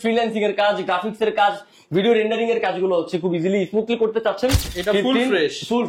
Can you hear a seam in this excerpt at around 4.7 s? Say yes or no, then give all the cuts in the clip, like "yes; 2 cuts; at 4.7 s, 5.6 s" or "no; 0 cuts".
yes; 1 cut; at 4.7 s